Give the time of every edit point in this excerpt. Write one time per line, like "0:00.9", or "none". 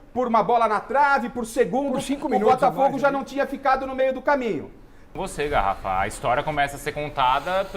0:02.8
0:05.1